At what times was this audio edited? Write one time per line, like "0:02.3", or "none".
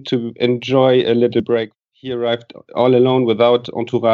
0:01.5